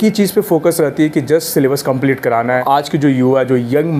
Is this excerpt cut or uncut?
cut